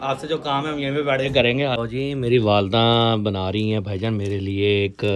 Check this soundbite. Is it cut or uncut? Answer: cut